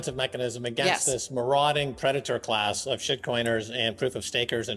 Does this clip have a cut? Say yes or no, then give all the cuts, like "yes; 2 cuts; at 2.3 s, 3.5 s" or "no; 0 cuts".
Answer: no; 0 cuts